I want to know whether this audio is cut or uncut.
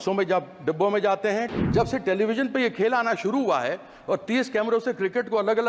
cut